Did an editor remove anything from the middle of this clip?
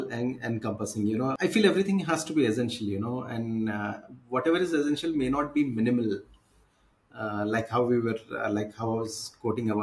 yes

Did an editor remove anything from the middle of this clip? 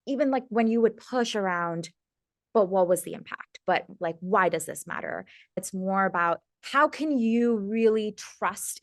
yes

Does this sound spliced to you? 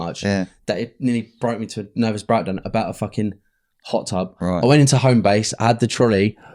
no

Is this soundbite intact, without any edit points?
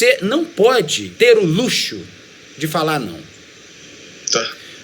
no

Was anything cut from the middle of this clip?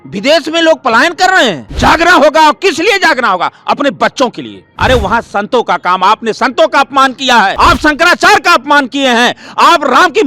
yes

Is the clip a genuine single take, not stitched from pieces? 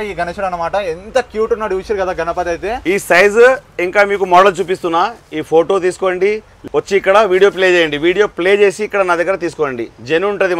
no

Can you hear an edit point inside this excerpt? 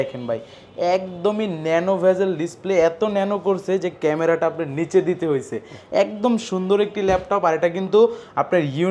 no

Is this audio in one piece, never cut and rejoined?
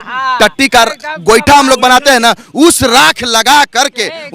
yes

